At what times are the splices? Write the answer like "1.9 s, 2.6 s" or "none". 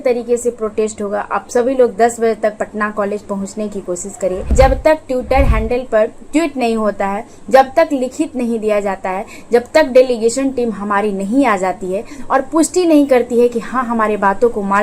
4.5 s